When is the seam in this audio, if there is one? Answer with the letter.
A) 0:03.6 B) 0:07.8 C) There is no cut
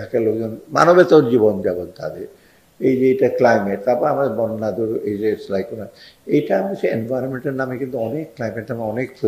C